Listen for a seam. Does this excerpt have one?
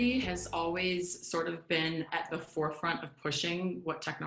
no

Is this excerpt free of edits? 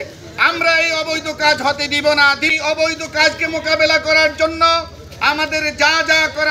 no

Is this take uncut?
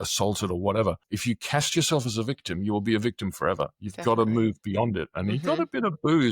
no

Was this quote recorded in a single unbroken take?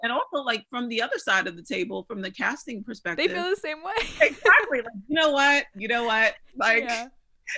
yes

